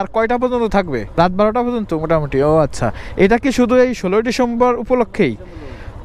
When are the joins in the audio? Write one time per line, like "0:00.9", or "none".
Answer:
0:01.1